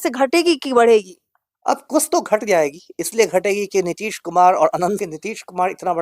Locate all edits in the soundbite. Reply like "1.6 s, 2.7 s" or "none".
5.0 s